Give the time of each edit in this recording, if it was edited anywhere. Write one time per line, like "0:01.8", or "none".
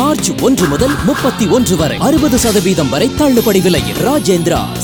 none